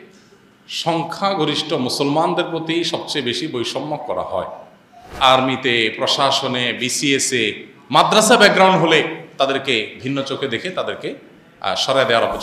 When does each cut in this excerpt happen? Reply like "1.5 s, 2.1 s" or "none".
5.1 s